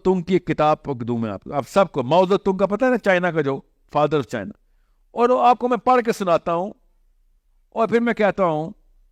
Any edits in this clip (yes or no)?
no